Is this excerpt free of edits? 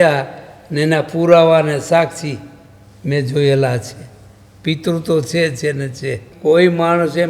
no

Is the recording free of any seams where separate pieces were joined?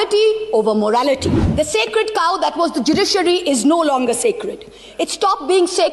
no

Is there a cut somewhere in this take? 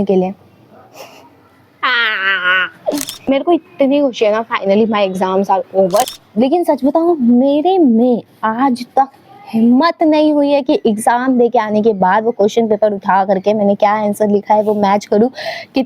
yes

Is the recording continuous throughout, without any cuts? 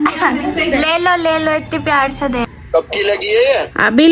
no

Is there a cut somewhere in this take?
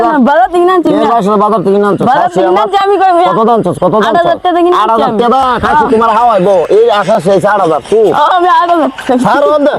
no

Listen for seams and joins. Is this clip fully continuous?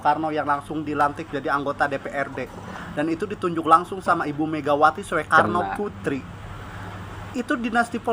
yes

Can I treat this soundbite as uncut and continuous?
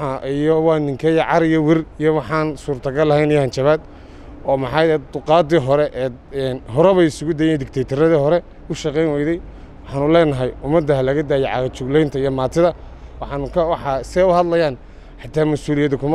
no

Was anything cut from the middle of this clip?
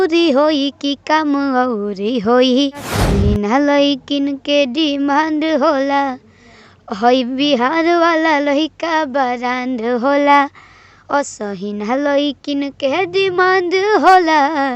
yes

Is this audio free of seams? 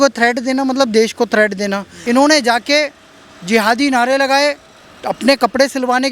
no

